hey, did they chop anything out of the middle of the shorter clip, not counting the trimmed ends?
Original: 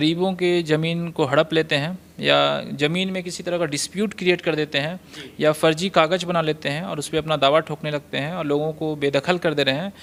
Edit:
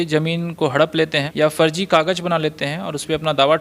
yes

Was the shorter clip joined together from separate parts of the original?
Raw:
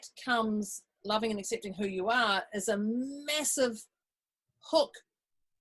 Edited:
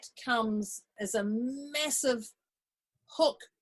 yes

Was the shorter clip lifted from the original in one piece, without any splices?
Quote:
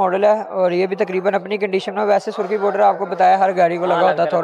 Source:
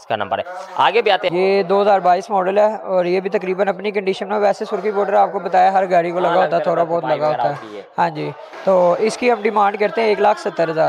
yes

